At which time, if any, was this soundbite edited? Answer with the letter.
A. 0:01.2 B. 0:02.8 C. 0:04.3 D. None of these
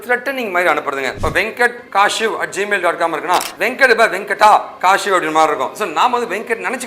A